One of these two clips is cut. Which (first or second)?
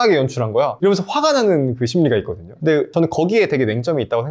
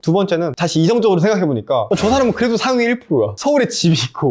first